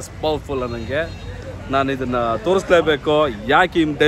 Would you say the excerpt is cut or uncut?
uncut